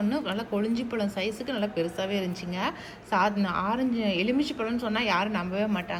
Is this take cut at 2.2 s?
no; 0 cuts

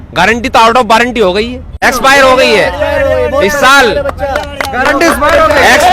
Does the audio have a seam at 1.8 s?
yes; 1 cut; at 1.8 s

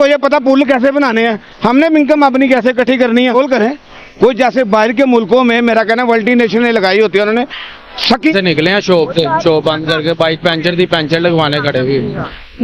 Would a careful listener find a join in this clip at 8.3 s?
yes; 2 cuts; at 3.3 s, 8.3 s

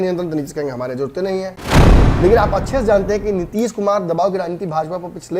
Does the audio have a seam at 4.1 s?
no; 1 cut; at 1.8 s

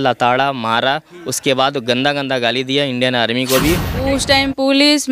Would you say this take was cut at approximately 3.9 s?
yes; 1 cut; at 3.9 s

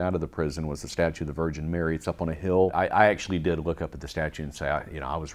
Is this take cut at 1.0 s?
yes; 1 cut; at 1.0 s

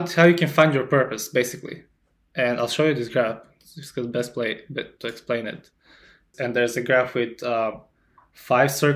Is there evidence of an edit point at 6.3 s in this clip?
yes; 1 cut; at 6.3 s

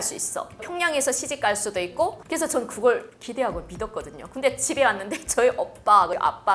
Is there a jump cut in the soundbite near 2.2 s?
yes; 1 cut; at 2.2 s

